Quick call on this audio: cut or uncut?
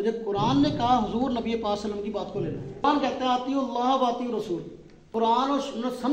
cut